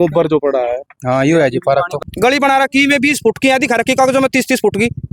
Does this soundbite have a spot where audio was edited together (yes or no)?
yes